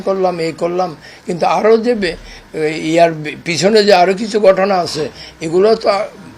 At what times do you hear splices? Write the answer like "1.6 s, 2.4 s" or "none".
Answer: none